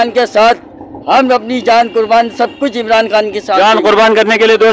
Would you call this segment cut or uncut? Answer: uncut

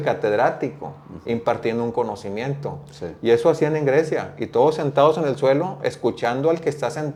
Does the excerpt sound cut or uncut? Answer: uncut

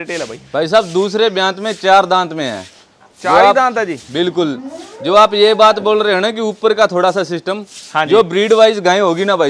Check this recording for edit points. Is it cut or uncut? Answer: uncut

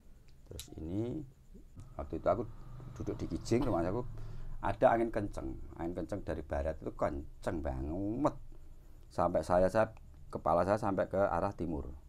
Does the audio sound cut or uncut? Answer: cut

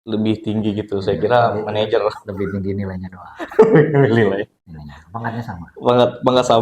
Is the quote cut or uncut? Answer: uncut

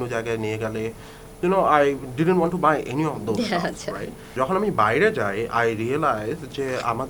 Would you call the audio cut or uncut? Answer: cut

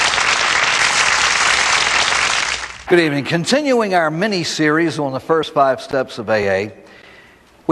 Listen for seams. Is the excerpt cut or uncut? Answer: uncut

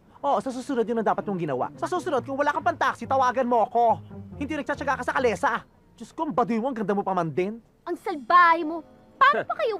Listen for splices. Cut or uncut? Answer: cut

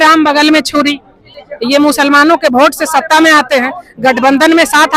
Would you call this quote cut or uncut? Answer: uncut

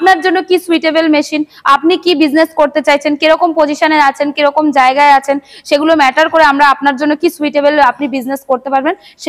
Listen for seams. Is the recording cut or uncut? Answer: uncut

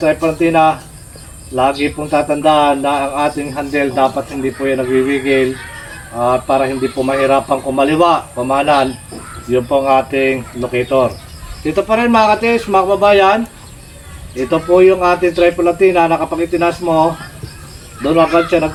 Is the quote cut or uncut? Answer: uncut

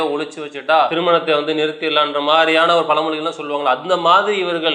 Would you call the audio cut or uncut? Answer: cut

